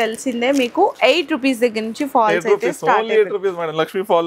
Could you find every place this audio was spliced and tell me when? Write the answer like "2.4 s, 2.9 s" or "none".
none